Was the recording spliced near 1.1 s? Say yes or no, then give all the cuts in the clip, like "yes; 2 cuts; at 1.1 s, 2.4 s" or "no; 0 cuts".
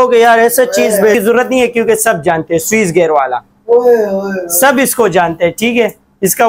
yes; 1 cut; at 1.1 s